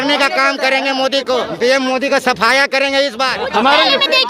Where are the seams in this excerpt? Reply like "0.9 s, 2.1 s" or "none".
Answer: 1.5 s, 3.4 s

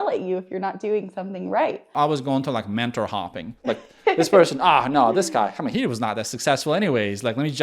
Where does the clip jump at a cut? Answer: 2.0 s

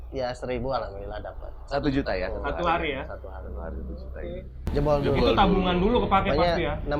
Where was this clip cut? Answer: 4.6 s

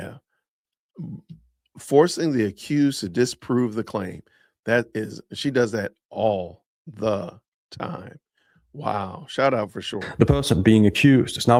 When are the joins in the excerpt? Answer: none

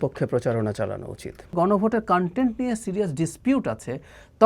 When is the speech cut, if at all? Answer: 1.5 s

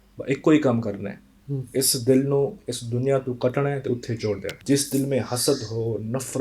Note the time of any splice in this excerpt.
4.6 s

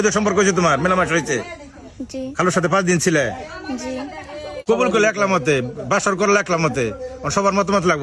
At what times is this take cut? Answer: 4.6 s

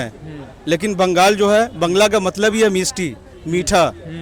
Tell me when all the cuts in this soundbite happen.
none

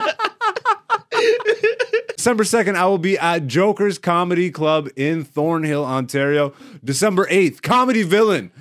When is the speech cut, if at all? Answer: 2.2 s

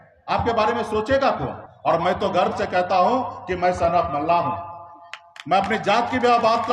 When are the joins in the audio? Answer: 1.6 s

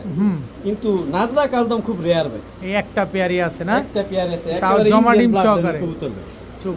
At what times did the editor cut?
none

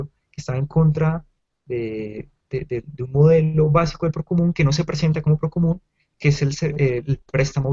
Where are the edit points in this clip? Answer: none

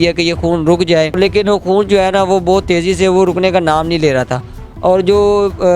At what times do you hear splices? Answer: 1.2 s

